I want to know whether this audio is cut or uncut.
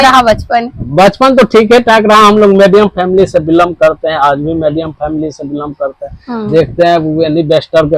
uncut